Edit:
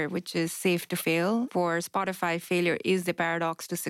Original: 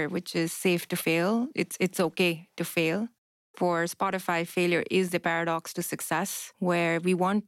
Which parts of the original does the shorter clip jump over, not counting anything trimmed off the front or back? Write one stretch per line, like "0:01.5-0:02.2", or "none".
0:01.5-0:03.5